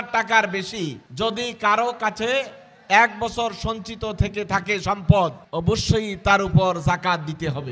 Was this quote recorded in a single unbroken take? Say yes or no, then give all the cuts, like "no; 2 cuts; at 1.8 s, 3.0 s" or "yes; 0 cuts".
no; 2 cuts; at 1.0 s, 5.5 s